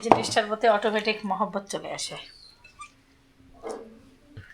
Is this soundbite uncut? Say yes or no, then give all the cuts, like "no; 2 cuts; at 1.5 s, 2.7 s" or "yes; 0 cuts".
yes; 0 cuts